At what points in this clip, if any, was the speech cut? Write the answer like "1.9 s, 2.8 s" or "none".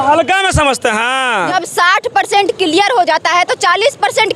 1.4 s